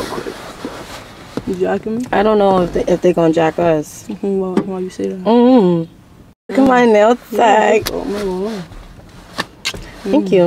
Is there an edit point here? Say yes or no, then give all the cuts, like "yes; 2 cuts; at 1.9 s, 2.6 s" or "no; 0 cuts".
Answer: yes; 1 cut; at 6.7 s